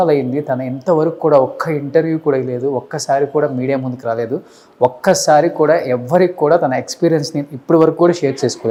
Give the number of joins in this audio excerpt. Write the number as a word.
zero